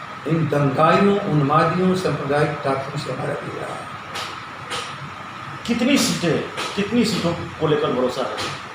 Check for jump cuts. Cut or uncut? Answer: uncut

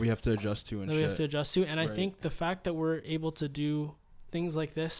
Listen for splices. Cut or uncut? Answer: uncut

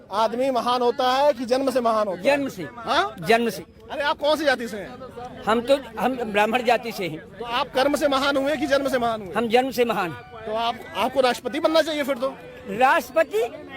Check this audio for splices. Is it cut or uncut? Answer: cut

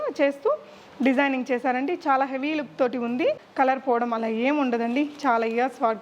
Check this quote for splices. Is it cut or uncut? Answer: cut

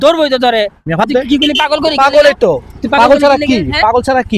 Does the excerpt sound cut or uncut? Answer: cut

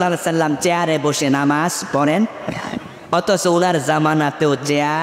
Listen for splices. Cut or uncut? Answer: uncut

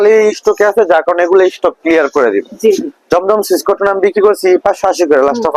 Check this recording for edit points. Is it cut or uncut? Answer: uncut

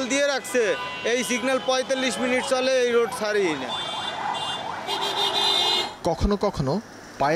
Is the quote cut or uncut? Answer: uncut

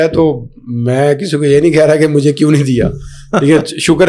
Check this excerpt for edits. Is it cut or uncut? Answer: uncut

